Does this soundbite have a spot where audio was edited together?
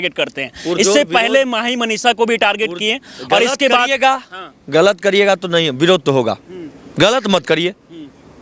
no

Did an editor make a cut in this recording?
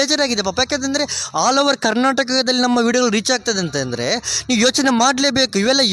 no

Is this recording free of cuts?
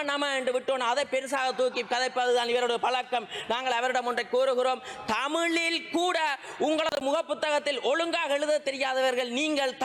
yes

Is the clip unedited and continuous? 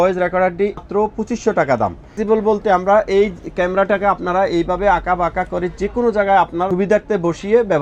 no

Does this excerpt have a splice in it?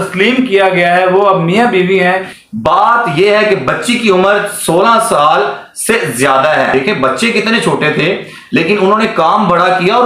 yes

